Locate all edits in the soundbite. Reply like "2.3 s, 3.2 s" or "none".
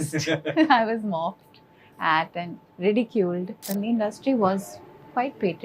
3.6 s